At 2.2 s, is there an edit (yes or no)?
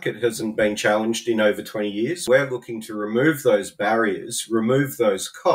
yes